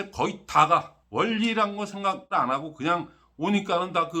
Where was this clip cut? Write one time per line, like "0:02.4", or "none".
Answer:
0:01.0
0:02.3

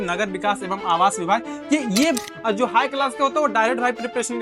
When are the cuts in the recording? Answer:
0:02.3

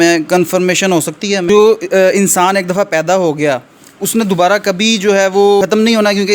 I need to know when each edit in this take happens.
0:01.4

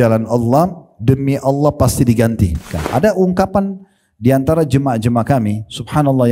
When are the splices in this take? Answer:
0:02.8

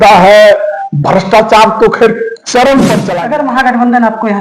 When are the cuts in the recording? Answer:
0:03.1

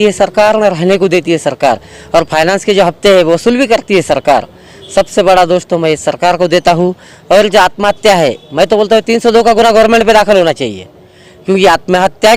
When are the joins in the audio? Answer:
none

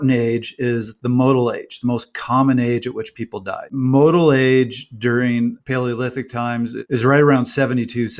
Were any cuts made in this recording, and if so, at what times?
0:03.7
0:05.6
0:06.8

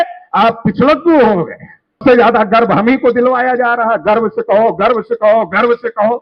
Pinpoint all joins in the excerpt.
0:02.0

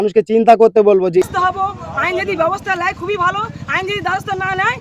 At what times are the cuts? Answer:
0:01.0

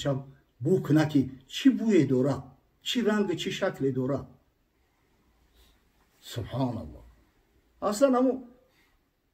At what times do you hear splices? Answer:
none

